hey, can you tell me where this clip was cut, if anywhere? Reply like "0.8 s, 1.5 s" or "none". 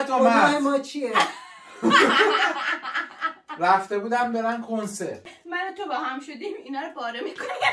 5.2 s